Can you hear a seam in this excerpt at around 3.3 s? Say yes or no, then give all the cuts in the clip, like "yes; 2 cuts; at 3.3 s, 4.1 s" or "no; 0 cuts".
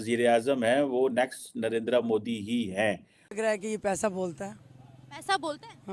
yes; 1 cut; at 3.3 s